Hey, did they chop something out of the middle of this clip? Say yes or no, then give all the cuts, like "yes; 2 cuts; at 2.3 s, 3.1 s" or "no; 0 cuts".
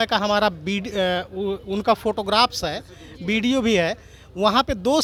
no; 0 cuts